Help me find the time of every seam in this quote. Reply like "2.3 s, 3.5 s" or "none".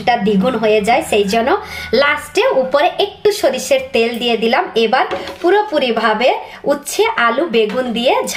none